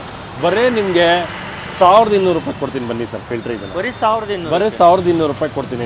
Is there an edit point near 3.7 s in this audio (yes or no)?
no